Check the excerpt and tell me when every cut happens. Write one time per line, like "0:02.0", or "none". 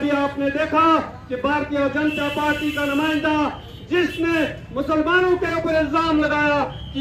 none